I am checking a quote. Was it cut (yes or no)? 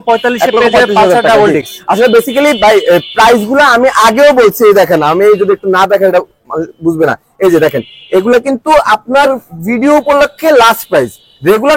no